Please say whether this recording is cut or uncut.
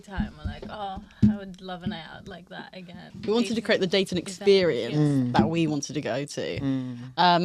cut